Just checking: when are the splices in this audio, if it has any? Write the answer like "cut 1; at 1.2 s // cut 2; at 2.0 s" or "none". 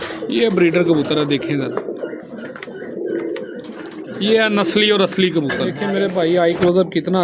cut 1; at 5.8 s